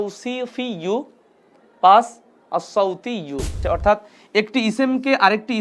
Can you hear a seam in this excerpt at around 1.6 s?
no; 1 cut; at 3.6 s

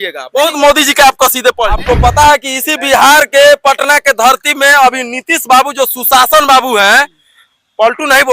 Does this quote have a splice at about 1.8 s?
yes; 1 cut; at 1.8 s

